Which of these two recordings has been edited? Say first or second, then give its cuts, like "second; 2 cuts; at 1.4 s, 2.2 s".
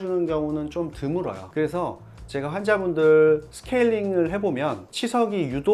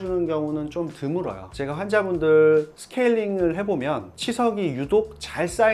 second; 1 cut; at 1.4 s